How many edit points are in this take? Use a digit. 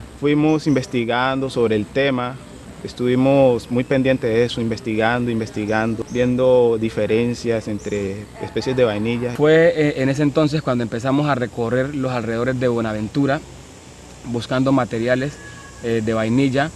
1